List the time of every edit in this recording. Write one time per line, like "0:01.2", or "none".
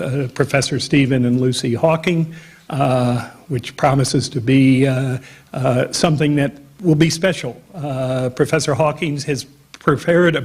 0:07.4

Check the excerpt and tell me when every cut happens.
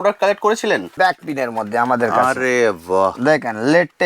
0:00.9

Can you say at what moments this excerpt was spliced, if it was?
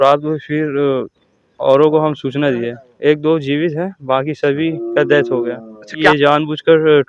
0:02.9
0:06.0

